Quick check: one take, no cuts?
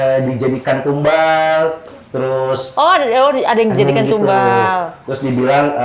yes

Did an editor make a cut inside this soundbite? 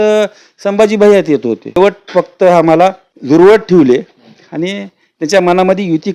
yes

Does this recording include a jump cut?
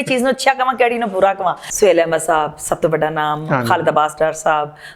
yes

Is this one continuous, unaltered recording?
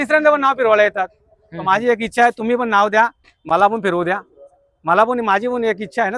yes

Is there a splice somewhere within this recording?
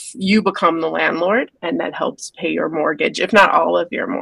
yes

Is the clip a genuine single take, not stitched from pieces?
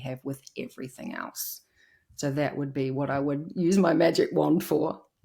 yes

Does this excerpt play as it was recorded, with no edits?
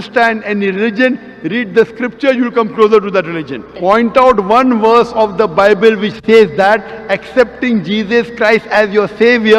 no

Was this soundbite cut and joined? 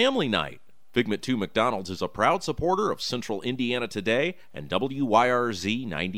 no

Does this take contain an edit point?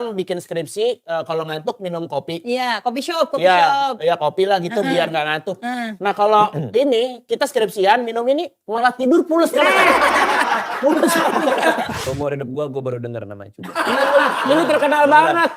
yes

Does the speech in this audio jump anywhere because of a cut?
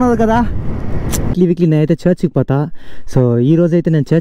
yes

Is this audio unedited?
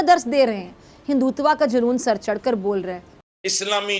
no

